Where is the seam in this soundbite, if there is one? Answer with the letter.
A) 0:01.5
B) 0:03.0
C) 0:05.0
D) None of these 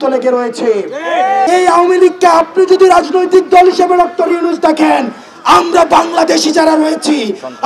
A